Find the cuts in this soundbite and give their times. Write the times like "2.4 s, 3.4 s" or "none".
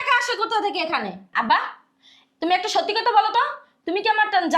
1.2 s